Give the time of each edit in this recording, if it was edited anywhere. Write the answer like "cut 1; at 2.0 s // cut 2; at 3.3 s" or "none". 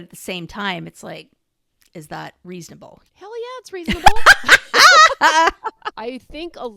cut 1; at 2.9 s // cut 2; at 5.9 s